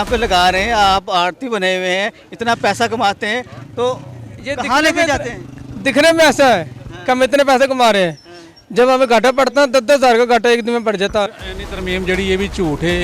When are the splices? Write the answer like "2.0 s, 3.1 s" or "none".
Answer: 11.4 s